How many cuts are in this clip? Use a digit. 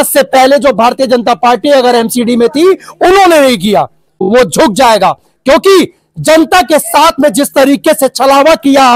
1